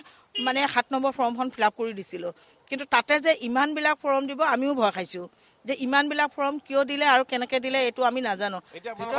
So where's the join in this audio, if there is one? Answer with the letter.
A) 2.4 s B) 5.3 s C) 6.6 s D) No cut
D